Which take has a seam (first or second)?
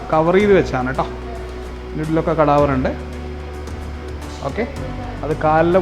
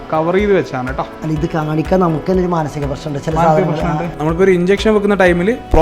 second